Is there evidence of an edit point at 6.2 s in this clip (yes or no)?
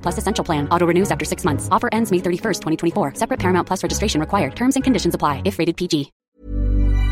yes